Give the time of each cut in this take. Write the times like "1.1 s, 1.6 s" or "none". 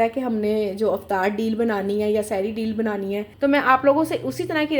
3.3 s